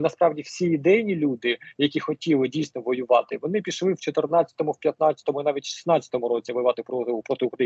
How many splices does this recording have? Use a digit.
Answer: 0